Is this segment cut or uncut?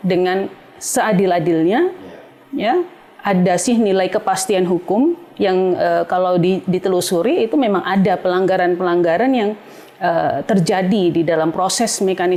uncut